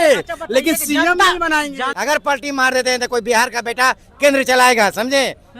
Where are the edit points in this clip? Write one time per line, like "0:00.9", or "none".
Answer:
0:01.8